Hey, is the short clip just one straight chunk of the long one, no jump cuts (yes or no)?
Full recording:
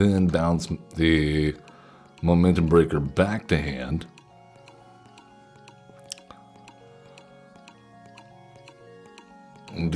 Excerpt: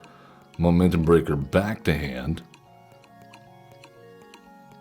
no